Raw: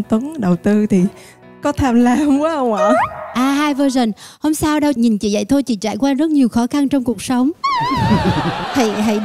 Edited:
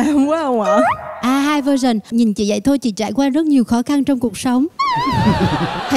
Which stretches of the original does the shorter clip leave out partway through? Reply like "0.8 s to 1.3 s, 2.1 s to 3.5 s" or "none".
4.2 s to 5.0 s